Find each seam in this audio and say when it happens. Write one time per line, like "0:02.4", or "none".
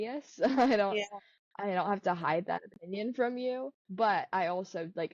0:03.8